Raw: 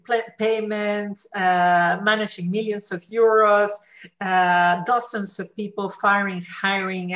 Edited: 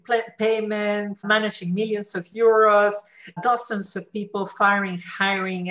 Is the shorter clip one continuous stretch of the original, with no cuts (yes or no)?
no